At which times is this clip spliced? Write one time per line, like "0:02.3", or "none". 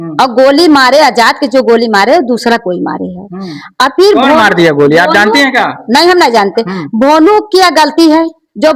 none